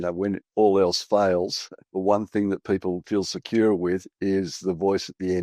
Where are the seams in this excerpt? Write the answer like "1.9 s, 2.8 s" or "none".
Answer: 3.0 s